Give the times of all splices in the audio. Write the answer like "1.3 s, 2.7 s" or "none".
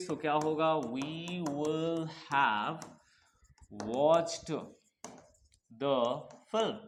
none